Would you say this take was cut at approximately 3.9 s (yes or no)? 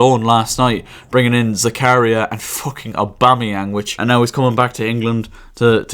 yes